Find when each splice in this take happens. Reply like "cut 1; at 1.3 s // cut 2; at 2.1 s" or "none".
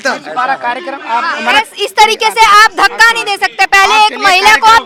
none